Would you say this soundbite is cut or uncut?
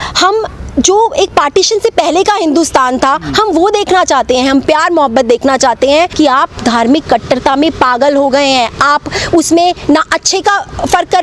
cut